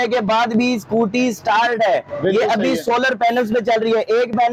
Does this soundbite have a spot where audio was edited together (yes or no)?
no